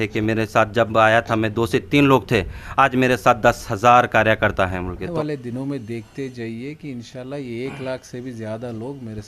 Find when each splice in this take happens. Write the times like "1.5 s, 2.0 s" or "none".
5.1 s